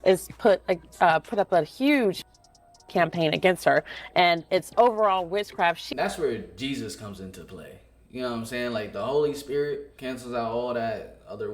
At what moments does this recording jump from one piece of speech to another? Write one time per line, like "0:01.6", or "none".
0:05.9
0:09.9